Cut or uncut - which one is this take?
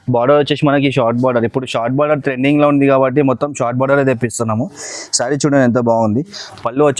uncut